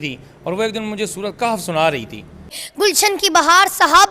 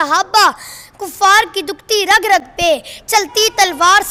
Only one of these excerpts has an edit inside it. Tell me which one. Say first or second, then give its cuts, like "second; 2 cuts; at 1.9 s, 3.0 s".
first; 1 cut; at 2.6 s